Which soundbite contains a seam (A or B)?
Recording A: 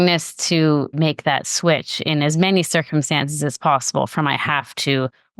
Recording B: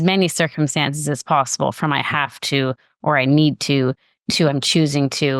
A